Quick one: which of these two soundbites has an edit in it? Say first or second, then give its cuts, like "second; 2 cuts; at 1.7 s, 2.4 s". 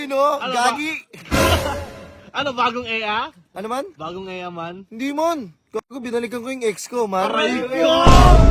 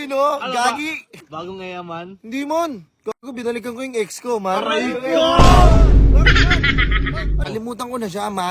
second; 2 cuts; at 1.2 s, 7.4 s